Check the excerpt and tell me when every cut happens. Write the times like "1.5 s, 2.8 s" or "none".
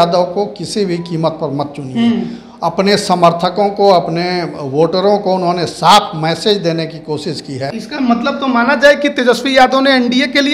7.6 s

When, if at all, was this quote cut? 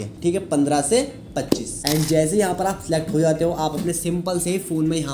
1.7 s

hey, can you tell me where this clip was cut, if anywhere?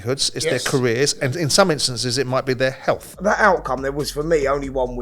3.1 s

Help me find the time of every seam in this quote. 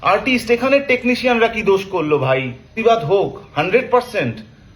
2.8 s

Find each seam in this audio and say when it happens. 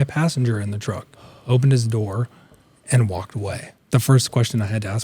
3.7 s

